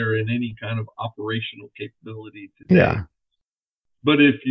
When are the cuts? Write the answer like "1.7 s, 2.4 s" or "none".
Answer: 3.5 s